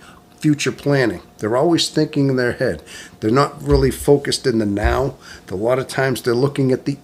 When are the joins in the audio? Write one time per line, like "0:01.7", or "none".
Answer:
none